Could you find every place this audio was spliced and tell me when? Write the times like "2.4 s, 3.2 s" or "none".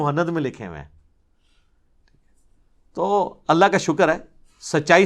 none